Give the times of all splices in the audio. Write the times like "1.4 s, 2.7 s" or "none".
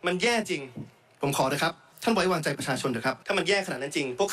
1.9 s, 3.2 s